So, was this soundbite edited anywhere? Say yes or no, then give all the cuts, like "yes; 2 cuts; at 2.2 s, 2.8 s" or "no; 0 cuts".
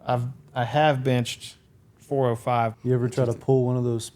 yes; 1 cut; at 2.8 s